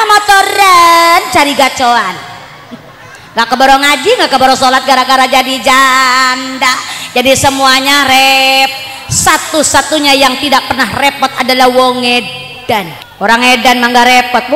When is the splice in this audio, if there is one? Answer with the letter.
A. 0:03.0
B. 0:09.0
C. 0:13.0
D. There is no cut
C